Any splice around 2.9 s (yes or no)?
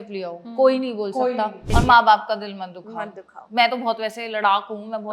no